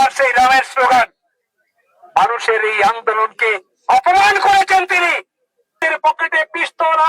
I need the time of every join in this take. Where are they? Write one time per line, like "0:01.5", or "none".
0:05.8